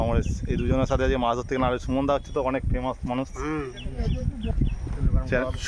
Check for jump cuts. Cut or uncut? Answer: cut